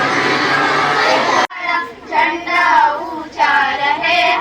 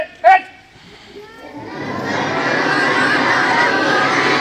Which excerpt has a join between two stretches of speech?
first; 1 cut; at 1.4 s

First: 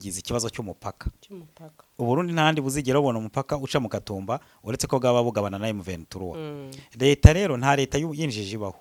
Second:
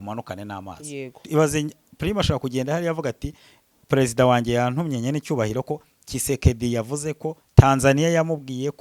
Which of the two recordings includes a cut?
second; 1 cut; at 1.2 s

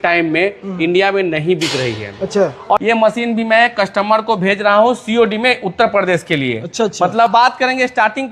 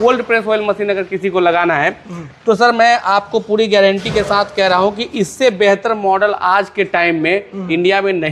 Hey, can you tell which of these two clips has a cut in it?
first; 2 cuts; at 2.8 s, 7.3 s

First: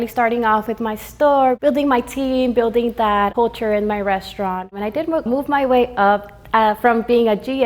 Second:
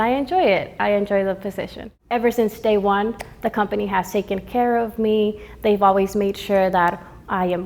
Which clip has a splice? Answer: first; 3 cuts; at 1.6 s, 3.3 s, 5.3 s

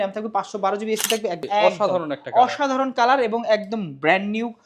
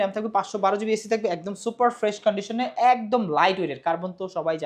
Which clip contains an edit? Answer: first; 1 cut; at 1.4 s

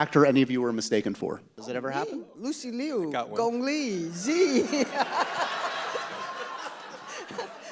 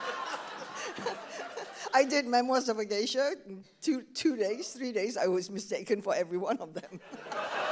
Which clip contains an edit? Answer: first; 1 cut; at 1.5 s

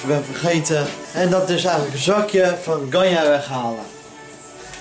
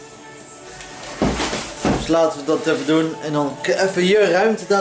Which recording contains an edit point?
first; 1 cut; at 1.0 s

